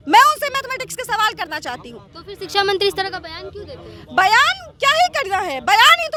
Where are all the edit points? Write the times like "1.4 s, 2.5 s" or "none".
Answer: none